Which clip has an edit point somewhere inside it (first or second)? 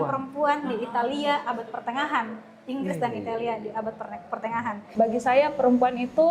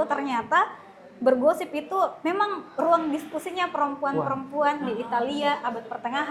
first